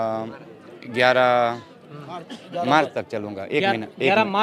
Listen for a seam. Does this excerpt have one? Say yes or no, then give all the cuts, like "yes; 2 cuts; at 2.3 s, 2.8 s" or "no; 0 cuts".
no; 0 cuts